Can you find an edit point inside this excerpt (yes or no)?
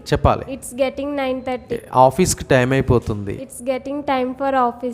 yes